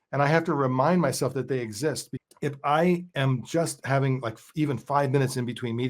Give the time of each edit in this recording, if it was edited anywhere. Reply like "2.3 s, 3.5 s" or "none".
2.1 s